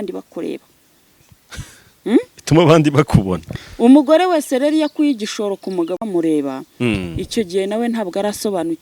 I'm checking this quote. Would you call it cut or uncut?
uncut